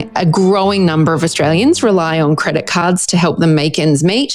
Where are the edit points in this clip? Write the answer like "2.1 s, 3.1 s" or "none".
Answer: none